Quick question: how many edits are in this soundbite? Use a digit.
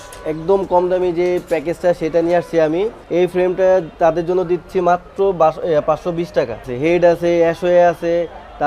2